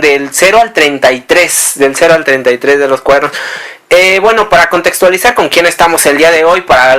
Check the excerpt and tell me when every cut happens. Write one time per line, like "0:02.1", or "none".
0:04.1